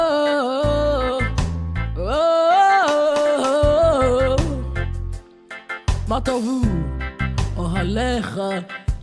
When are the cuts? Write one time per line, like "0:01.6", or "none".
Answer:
0:03.9